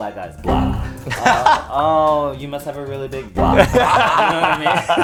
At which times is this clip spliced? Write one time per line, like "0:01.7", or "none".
none